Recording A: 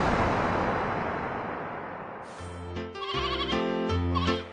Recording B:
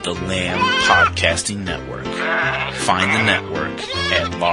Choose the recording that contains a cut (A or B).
A